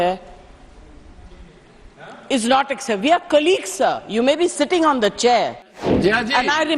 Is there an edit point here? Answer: yes; 1 cut; at 5.7 s

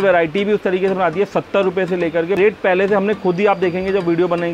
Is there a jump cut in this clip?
yes; 1 cut; at 2.4 s

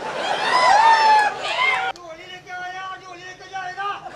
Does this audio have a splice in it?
yes; 1 cut; at 1.9 s

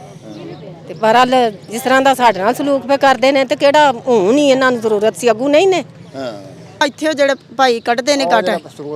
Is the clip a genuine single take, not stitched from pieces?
no; 1 cut; at 6.8 s

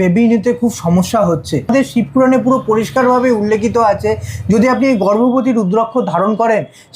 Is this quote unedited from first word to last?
no; 1 cut; at 1.7 s

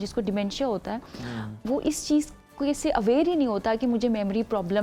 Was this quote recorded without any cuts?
yes; 0 cuts

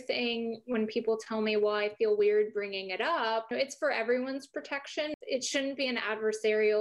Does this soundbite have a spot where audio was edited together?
yes; 1 cut; at 5.1 s

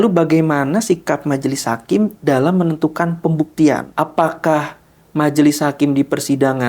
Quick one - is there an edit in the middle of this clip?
yes; 1 cut; at 3.9 s

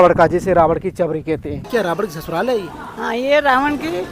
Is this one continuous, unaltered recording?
no; 1 cut; at 1.7 s

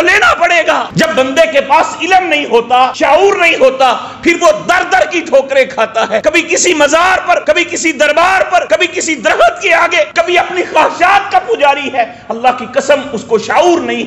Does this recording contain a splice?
yes; 6 cuts; at 0.9 s, 3.0 s, 6.2 s, 7.4 s, 8.7 s, 10.1 s

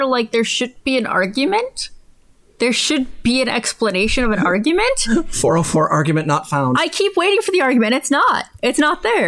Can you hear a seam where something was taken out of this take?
no; 0 cuts

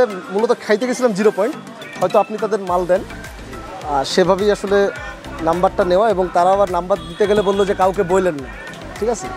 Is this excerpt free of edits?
yes; 0 cuts

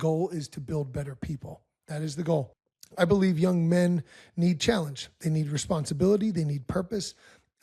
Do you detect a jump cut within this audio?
yes; 1 cut; at 2.6 s

